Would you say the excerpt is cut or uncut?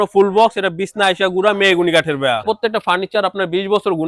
cut